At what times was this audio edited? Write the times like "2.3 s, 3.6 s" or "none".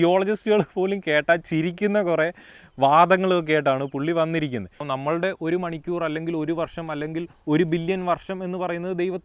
4.8 s